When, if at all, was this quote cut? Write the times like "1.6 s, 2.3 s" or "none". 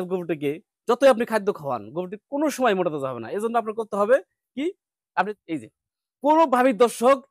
5.3 s